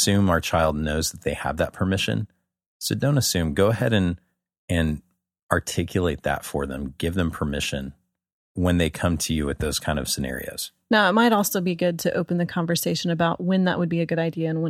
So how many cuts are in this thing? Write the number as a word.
one